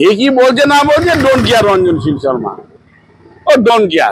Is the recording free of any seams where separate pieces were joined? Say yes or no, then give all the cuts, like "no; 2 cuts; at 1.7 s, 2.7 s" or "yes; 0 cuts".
yes; 0 cuts